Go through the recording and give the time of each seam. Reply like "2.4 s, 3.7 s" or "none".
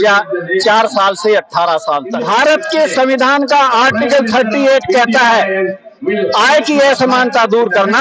2.1 s